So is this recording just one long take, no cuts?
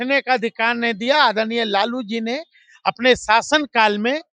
yes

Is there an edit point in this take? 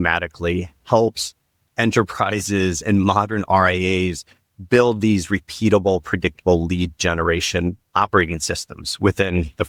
no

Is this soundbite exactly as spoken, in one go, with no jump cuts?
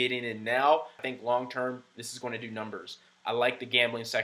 no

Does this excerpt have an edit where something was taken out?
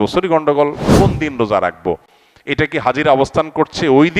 yes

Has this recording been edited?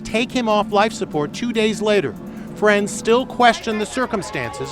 no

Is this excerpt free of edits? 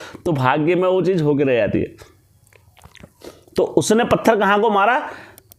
yes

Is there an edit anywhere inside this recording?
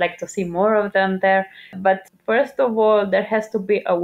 yes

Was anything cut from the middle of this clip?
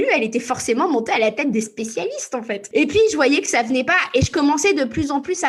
yes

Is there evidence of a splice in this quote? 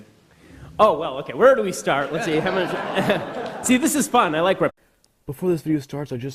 no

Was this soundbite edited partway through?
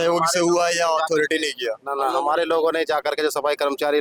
no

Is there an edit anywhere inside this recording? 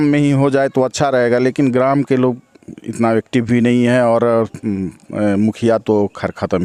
no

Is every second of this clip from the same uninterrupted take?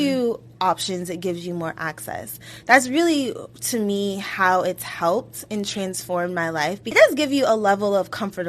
no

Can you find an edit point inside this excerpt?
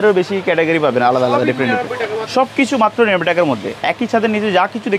no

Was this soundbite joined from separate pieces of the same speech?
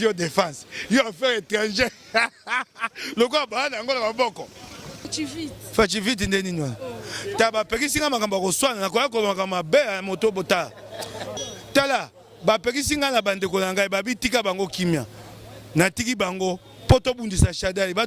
yes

